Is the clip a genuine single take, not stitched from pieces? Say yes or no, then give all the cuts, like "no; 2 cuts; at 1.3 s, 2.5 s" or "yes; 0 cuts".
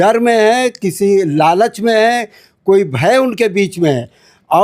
yes; 0 cuts